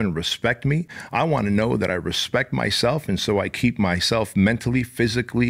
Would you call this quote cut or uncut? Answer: uncut